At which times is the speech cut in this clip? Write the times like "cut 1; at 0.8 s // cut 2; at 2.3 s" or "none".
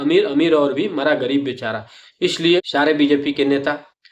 cut 1; at 2.6 s